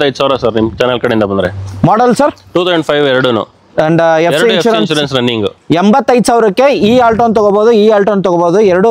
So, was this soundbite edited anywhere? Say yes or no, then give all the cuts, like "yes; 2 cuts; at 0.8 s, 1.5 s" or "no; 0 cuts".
no; 0 cuts